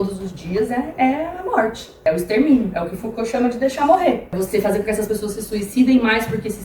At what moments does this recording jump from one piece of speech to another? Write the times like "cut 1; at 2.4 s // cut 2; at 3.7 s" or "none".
cut 1; at 1.9 s // cut 2; at 4.3 s